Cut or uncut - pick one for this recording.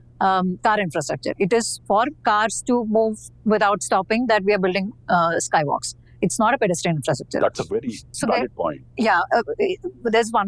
uncut